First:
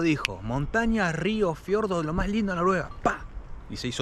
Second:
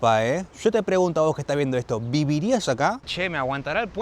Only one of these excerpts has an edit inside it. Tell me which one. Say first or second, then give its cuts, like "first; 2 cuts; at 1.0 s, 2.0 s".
second; 1 cut; at 3.0 s